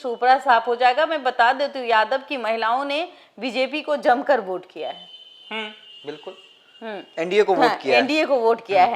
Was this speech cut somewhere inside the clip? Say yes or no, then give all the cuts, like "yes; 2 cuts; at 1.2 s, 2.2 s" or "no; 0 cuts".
no; 0 cuts